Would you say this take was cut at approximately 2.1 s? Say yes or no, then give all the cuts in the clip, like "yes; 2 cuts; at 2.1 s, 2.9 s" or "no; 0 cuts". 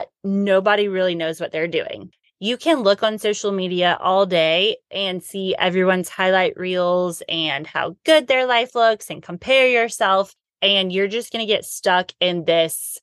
yes; 1 cut; at 2.1 s